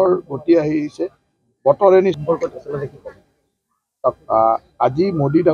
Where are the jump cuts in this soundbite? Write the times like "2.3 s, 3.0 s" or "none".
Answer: 2.7 s